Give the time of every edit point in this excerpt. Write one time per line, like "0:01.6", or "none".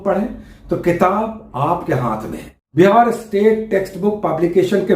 0:02.6

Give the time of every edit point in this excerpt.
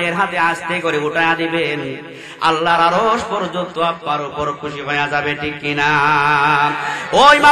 none

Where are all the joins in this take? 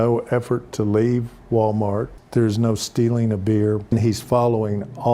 0:02.2
0:03.8

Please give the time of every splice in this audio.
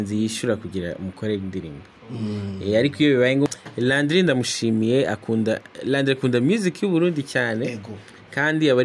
0:03.5

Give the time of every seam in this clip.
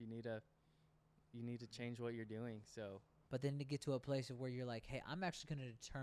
0:03.1

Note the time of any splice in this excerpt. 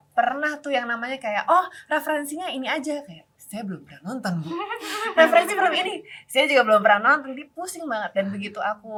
none

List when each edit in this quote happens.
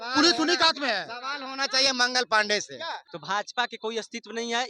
0:03.1

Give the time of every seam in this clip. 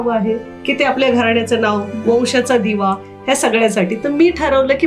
none

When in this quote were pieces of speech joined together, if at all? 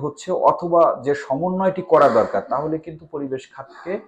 none

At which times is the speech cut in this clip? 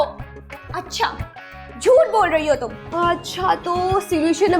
0:02.8

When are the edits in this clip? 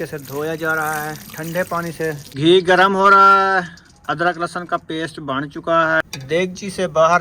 0:02.4
0:06.0

